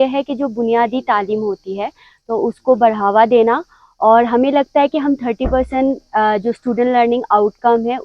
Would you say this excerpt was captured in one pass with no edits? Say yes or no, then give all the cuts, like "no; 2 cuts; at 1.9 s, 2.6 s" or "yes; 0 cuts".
yes; 0 cuts